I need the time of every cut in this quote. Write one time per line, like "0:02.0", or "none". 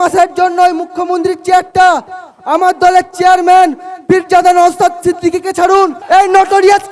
0:06.0